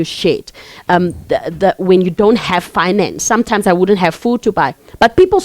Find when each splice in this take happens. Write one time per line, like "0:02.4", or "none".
0:03.2